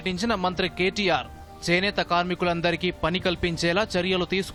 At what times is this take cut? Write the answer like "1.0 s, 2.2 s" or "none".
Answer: none